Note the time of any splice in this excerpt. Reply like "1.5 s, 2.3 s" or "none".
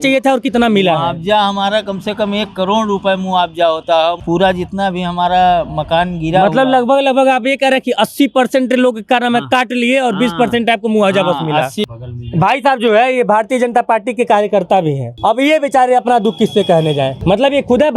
4.2 s, 11.9 s, 15.1 s, 17.2 s